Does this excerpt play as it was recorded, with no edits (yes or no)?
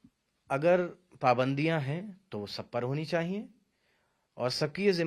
yes